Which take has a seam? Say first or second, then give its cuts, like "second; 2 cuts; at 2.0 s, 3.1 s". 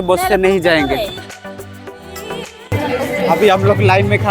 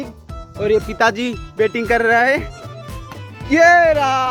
first; 1 cut; at 1.2 s